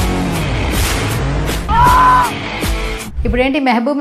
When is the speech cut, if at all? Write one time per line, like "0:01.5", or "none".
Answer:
0:01.6
0:03.0